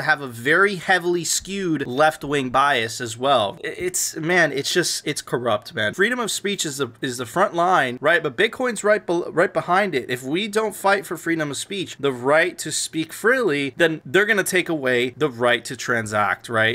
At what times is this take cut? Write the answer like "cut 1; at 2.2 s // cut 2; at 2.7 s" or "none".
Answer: cut 1; at 3.6 s // cut 2; at 5.9 s